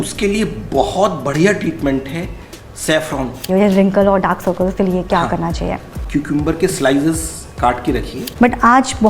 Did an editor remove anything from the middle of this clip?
yes; 3 cuts; at 3.4 s, 6.0 s, 8.2 s

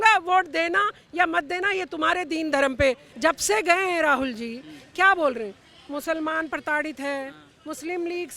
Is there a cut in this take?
yes; 1 cut; at 3.1 s

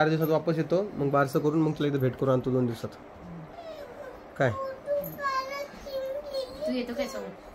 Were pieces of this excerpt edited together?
no; 0 cuts

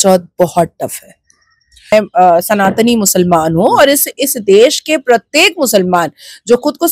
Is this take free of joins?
no; 1 cut; at 1.9 s

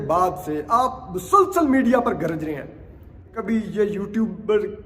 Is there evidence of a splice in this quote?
yes; 1 cut; at 3.4 s

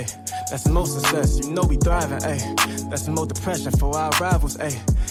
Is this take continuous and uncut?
yes; 0 cuts

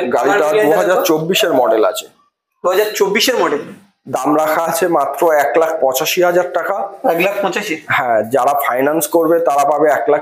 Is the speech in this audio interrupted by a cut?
no; 0 cuts

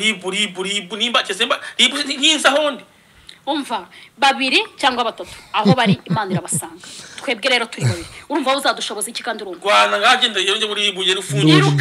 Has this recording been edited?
no; 0 cuts

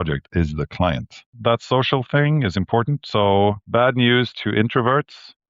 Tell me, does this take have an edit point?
yes; 2 cuts; at 1.3 s, 3.6 s

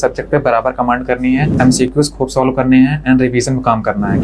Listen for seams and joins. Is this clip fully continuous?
no; 1 cut; at 1.5 s

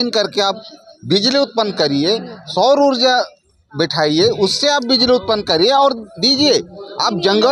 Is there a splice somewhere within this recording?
no; 0 cuts

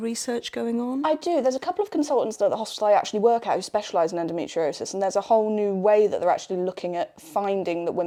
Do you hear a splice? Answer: no; 0 cuts

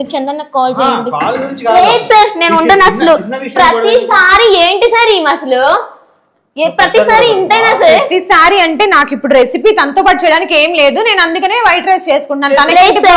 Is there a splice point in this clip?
no; 0 cuts

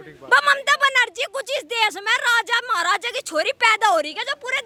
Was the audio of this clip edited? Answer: no; 0 cuts

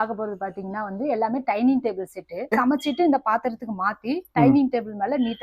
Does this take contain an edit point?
yes; 1 cut; at 2.5 s

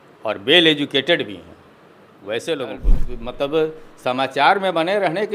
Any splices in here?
yes; 1 cut; at 2.9 s

